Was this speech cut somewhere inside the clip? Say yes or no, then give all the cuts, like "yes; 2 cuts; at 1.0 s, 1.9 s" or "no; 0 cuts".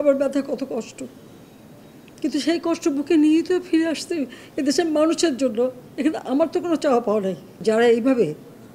yes; 1 cut; at 7.6 s